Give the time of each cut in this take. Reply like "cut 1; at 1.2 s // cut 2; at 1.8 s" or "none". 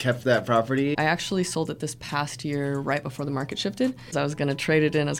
cut 1; at 0.9 s // cut 2; at 4.1 s